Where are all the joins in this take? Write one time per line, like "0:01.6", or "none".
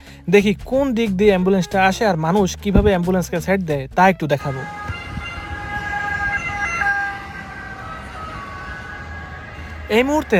none